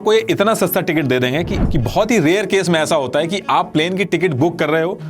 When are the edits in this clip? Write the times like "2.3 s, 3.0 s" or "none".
1.6 s